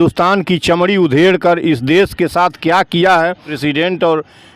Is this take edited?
yes; 1 cut; at 3.5 s

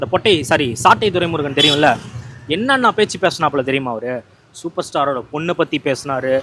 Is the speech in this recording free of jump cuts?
yes; 0 cuts

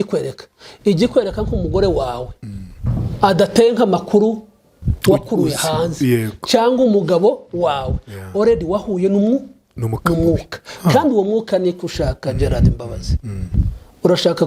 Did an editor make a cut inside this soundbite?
no; 0 cuts

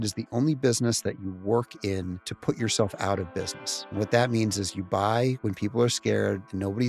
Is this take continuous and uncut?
yes; 0 cuts

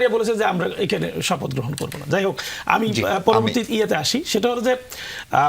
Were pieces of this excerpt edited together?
no; 0 cuts

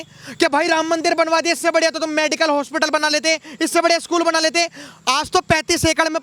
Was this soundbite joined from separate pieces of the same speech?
no; 0 cuts

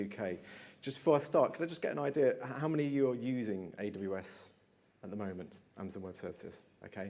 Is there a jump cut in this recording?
no; 0 cuts

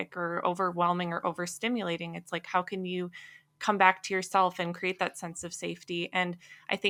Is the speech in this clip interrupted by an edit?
no; 0 cuts

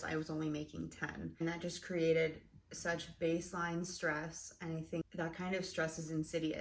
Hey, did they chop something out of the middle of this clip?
yes; 2 cuts; at 1.4 s, 5.0 s

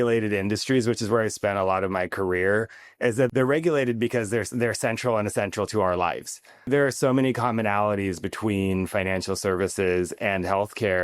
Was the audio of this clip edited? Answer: yes; 2 cuts; at 3.3 s, 6.7 s

